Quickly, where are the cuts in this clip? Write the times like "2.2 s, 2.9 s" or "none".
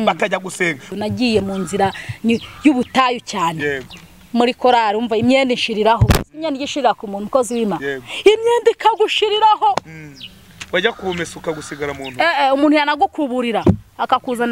0.9 s